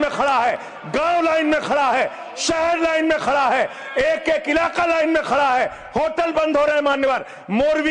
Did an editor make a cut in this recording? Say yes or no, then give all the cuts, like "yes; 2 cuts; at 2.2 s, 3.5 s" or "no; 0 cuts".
no; 0 cuts